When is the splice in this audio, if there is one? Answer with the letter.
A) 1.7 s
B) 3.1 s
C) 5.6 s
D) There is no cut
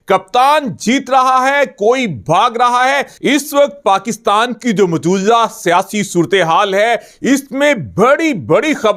B